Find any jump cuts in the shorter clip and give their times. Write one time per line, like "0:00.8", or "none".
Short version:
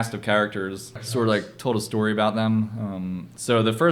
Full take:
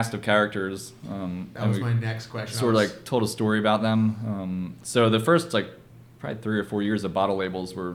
0:00.9